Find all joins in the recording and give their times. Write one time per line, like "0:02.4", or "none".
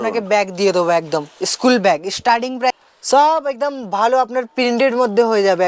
0:02.8